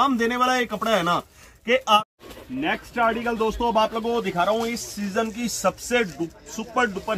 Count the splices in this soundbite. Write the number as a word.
one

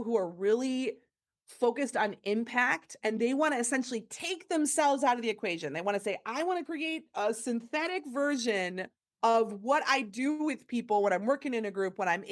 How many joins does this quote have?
zero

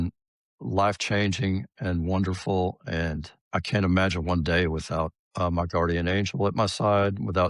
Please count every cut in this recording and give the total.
two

